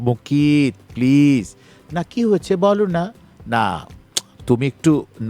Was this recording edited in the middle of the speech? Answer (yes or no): no